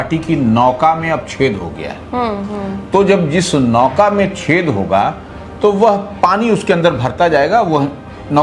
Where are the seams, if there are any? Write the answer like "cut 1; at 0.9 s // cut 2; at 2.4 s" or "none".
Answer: none